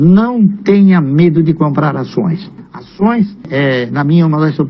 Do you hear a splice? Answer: no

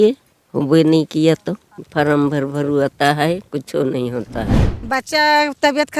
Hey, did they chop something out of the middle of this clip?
yes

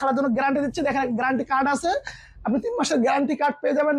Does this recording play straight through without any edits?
yes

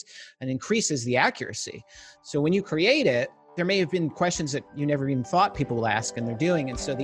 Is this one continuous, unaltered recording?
no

